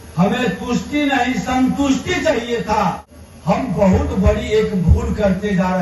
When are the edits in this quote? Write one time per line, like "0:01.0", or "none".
0:03.1